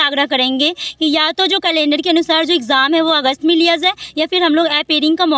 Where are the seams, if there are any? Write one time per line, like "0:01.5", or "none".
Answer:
none